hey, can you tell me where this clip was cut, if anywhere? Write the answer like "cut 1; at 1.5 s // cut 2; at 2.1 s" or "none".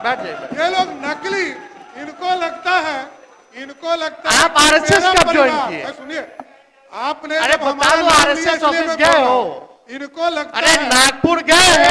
none